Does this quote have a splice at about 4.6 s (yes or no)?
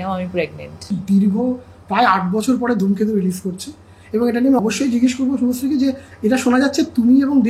yes